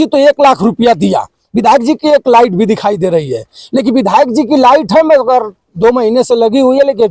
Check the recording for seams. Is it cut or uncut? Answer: uncut